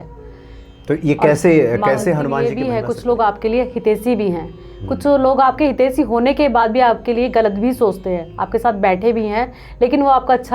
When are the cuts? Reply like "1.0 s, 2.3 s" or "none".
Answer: 2.4 s